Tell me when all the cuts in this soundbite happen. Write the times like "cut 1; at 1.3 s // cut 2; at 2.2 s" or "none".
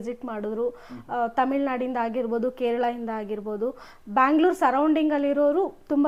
none

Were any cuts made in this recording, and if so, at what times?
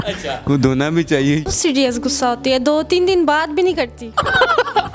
cut 1; at 1.5 s // cut 2; at 4.0 s

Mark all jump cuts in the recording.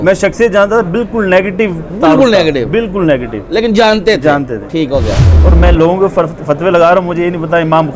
cut 1; at 5.3 s

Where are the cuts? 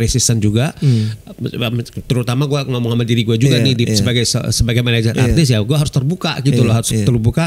none

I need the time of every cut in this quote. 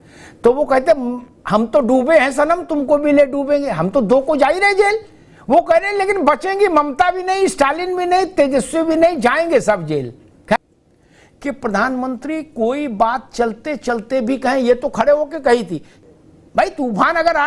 cut 1; at 10.6 s // cut 2; at 16.0 s

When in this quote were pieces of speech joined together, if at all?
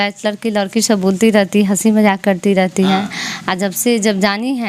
none

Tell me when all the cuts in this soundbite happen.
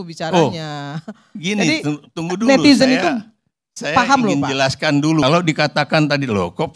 cut 1; at 5.2 s

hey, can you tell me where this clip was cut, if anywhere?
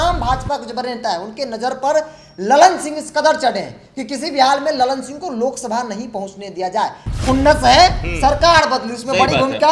none

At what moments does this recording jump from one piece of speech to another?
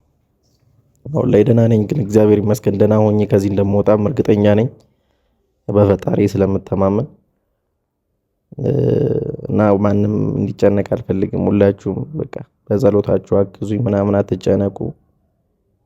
none

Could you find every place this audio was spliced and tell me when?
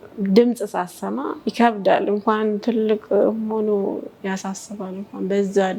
none

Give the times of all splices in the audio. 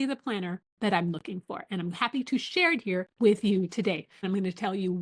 cut 1; at 3.1 s // cut 2; at 4.2 s

